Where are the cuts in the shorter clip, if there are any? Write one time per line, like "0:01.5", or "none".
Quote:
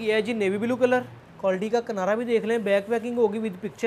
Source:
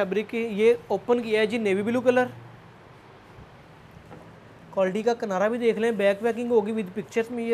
0:01.2